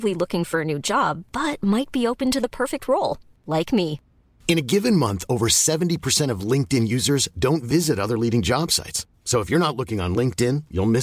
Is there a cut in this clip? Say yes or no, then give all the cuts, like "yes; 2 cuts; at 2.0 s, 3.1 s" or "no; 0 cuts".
no; 0 cuts